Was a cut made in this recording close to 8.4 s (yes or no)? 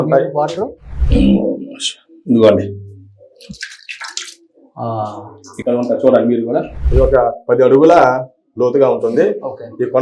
no